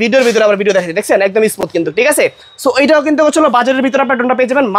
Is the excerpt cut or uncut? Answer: uncut